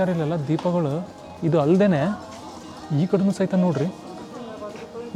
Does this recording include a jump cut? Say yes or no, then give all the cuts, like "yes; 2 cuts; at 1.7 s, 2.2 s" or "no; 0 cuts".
no; 0 cuts